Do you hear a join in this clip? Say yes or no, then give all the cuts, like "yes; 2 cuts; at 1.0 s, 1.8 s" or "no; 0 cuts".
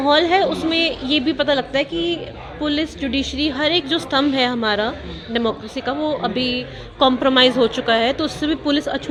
no; 0 cuts